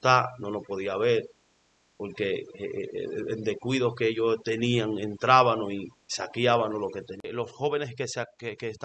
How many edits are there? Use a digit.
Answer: 1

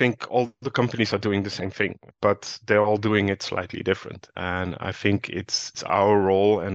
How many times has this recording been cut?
2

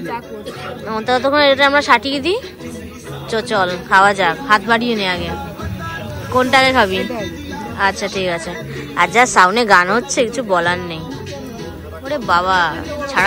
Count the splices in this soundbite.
0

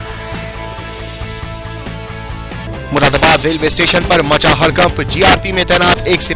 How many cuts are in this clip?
1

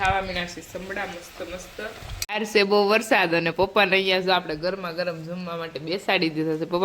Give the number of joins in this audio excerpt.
1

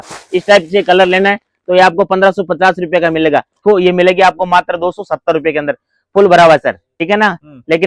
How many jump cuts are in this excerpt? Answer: 2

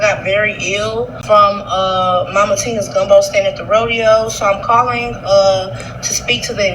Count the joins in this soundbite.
1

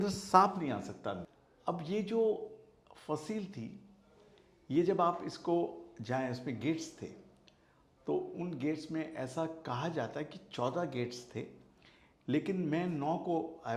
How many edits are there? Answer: 0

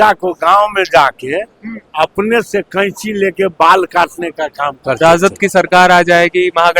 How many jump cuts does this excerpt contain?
1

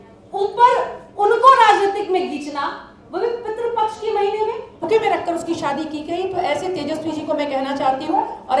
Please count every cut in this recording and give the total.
1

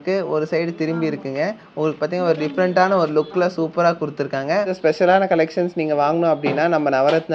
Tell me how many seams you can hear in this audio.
1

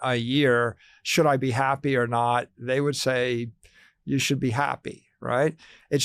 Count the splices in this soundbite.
0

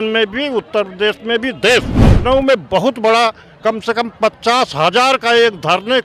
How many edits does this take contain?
1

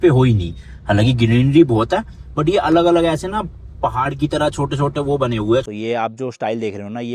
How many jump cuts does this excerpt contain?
1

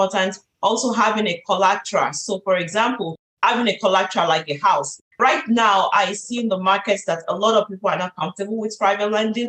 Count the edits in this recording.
2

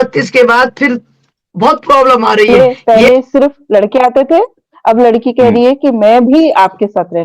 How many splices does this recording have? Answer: 1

